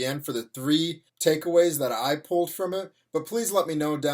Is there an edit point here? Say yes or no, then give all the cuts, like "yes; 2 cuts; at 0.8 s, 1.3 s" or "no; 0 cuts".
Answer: yes; 1 cut; at 1.0 s